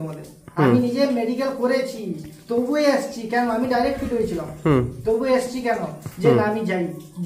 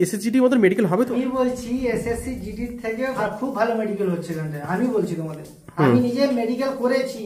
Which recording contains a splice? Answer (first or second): second